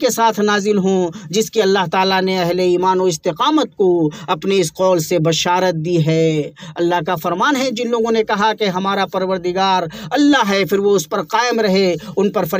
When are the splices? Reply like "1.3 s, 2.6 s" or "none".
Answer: none